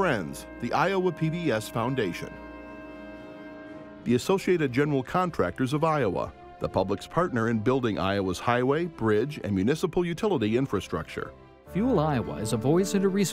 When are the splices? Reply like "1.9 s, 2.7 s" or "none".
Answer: 2.2 s, 4.0 s

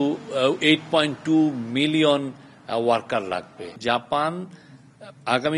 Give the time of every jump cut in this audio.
3.7 s

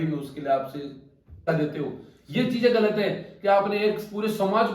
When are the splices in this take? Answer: 1.5 s

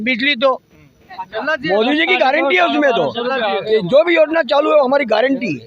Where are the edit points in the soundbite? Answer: 1.3 s

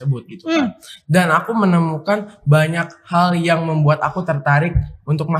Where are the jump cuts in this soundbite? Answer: none

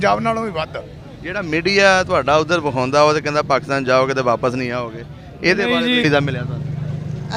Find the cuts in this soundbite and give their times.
6.0 s

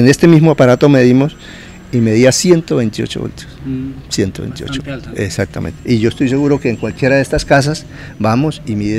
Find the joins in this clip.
none

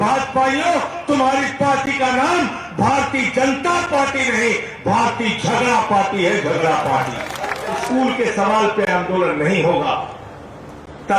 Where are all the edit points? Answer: 7.8 s

